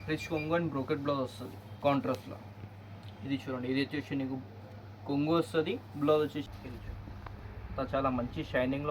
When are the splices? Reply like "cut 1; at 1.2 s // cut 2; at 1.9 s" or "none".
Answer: cut 1; at 6.5 s